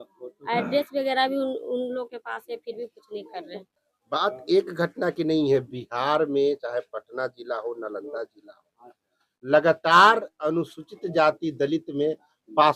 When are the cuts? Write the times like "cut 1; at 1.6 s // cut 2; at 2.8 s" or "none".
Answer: cut 1; at 3.6 s